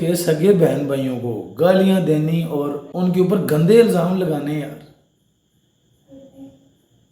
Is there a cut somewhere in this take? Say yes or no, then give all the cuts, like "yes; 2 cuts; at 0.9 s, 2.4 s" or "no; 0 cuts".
yes; 1 cut; at 2.8 s